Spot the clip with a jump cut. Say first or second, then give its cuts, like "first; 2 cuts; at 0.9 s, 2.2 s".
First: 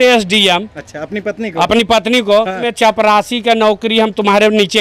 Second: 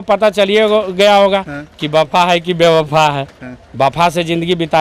first; 1 cut; at 2.6 s